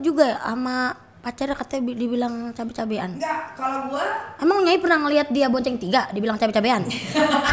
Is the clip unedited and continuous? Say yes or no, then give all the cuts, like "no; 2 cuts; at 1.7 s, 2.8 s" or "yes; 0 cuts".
yes; 0 cuts